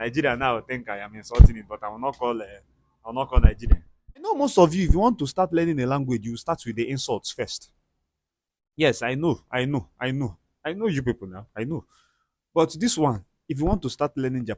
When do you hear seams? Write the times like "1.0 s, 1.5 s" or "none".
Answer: 4.3 s